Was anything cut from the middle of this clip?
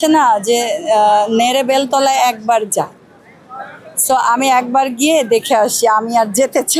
no; 0 cuts

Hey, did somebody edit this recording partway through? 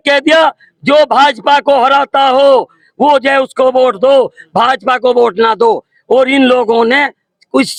no; 0 cuts

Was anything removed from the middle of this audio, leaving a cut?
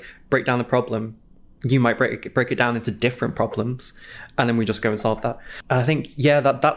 yes; 1 cut; at 5.5 s

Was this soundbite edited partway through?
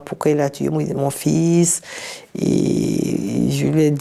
no; 0 cuts

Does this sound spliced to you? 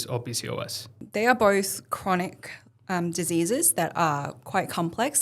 yes; 1 cut; at 1.0 s

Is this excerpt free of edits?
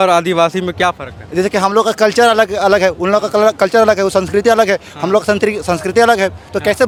yes; 0 cuts

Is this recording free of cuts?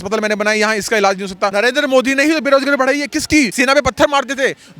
no; 2 cuts; at 1.5 s, 3.5 s

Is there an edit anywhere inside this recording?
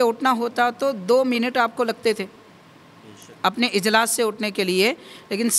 no; 0 cuts

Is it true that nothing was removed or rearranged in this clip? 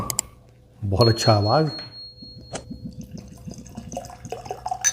no; 1 cut; at 2.0 s

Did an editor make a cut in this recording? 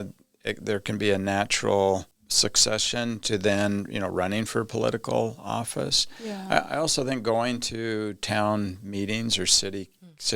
yes; 1 cut; at 2.2 s

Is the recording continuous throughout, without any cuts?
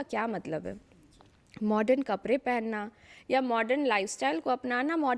yes; 0 cuts

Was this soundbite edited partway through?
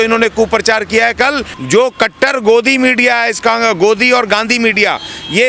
yes; 1 cut; at 1.5 s

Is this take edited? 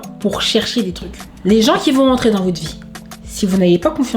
yes; 1 cut; at 1.2 s

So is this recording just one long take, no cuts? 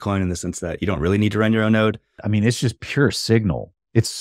no; 1 cut; at 2.2 s

